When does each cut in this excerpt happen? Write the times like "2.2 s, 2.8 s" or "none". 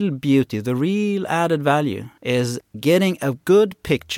2.1 s

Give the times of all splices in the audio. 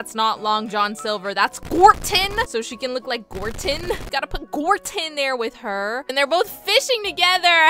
4.0 s

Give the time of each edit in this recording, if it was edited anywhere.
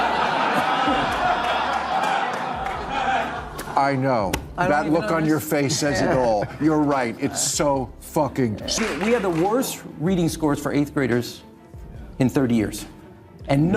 8.8 s

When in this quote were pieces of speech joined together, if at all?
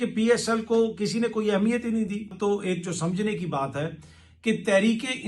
2.4 s

